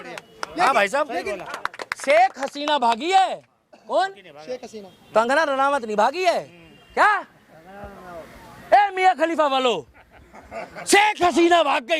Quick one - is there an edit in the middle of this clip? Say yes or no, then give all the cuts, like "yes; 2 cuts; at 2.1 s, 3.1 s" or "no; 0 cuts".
yes; 1 cut; at 1.4 s